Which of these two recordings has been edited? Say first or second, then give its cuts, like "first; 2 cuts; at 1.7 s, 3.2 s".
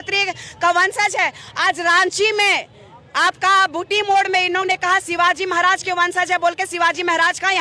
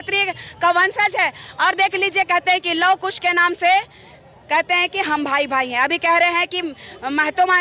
second; 1 cut; at 1.4 s